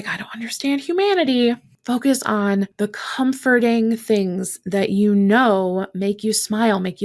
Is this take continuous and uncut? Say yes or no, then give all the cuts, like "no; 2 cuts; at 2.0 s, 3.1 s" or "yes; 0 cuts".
no; 2 cuts; at 1.7 s, 2.7 s